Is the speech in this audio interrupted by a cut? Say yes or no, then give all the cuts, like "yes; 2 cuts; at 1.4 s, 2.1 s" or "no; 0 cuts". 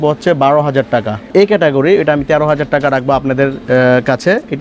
yes; 1 cut; at 1.3 s